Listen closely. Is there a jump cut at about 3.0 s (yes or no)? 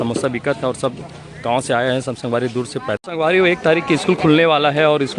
yes